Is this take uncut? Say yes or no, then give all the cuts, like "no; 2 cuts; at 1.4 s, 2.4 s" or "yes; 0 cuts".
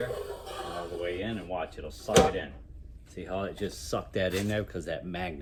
yes; 0 cuts